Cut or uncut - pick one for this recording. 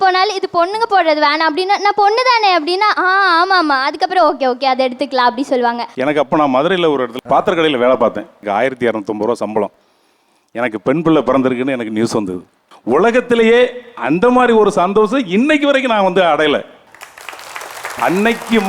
cut